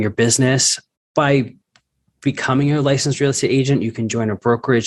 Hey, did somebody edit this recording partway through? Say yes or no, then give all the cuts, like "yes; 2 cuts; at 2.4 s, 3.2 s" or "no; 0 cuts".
no; 0 cuts